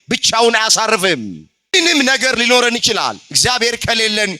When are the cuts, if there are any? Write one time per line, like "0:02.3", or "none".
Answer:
0:01.7